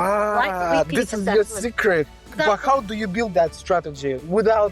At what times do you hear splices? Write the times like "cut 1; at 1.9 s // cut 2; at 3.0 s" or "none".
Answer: cut 1; at 2.2 s